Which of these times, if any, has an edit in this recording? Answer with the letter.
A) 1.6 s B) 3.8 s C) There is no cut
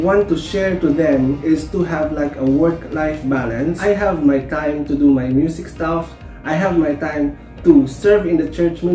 B